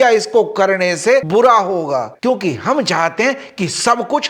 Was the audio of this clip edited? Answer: yes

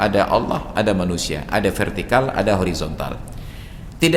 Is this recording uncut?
yes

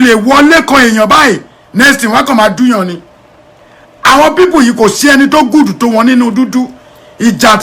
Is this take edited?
yes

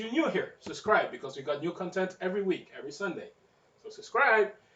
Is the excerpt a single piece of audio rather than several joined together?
no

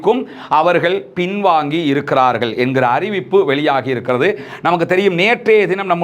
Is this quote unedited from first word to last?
yes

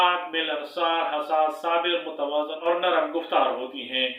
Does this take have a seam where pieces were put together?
yes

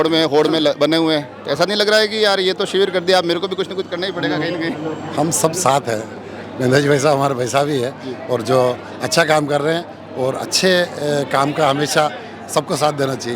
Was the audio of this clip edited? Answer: no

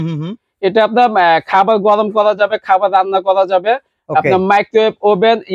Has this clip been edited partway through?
no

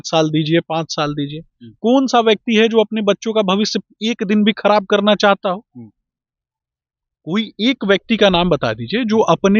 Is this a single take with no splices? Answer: yes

